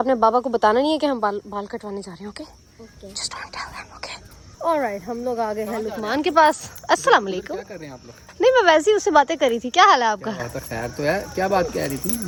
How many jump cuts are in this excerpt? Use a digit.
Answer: 0